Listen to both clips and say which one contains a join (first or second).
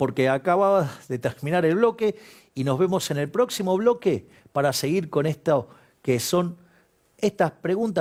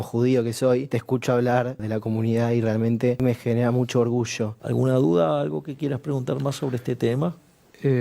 second